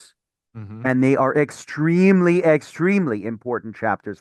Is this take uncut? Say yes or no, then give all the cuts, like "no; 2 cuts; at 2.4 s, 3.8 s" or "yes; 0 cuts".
yes; 0 cuts